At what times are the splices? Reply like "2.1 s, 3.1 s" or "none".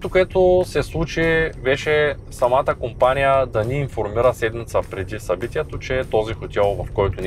none